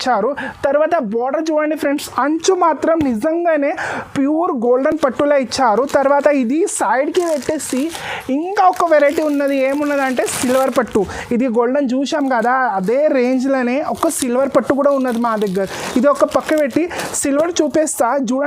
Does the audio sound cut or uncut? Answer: uncut